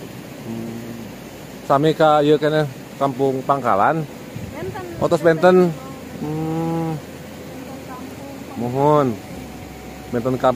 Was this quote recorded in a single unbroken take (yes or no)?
yes